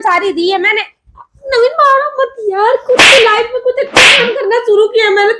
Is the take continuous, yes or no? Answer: yes